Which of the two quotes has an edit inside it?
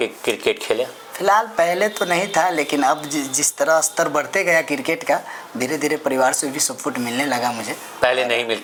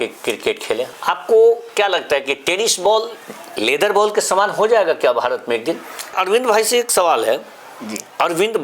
second; 2 cuts; at 0.9 s, 6.1 s

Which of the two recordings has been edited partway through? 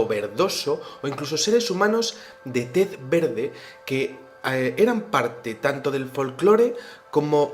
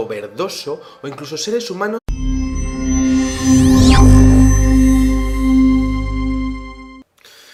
first; 1 cut; at 2.0 s

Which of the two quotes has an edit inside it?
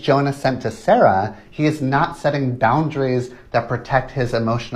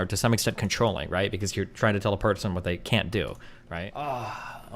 second; 1 cut; at 3.6 s

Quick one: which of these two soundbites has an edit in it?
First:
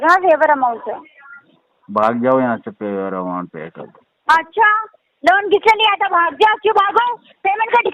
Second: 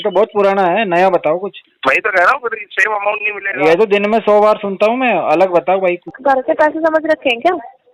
second; 2 cuts; at 1.7 s, 6.1 s

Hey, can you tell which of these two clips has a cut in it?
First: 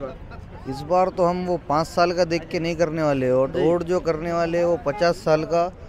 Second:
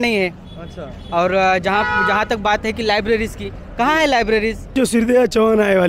second; 1 cut; at 4.8 s

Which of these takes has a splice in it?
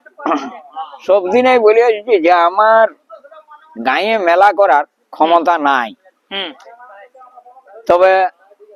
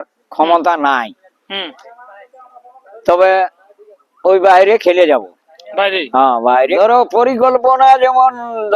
second; 1 cut; at 6.8 s

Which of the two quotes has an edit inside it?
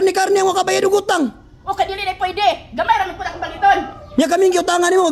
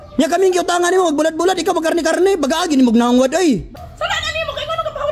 second; 1 cut; at 3.8 s

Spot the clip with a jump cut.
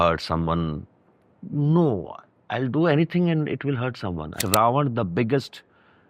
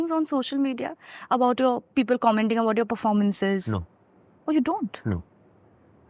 first; 1 cut; at 4.4 s

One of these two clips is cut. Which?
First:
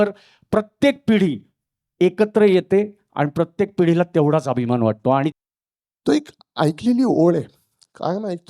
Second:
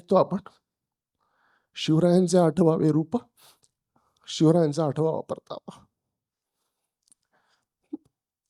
first; 1 cut; at 5.3 s

